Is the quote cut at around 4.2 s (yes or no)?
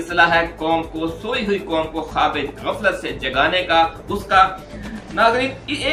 no